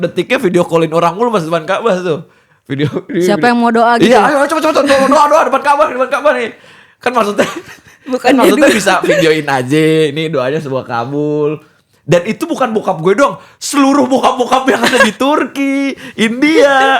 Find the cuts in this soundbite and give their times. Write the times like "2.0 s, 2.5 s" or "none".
none